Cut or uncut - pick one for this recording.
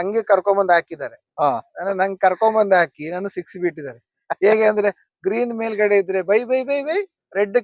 uncut